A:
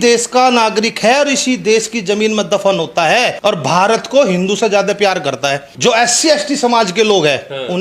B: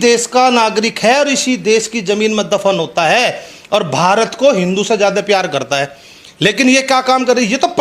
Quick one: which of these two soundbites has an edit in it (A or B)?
A